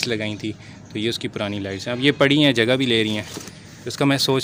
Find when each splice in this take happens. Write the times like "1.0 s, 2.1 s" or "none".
none